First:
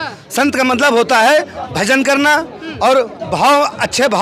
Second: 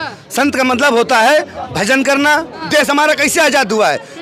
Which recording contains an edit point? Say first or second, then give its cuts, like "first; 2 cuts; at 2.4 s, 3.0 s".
second; 1 cut; at 2.5 s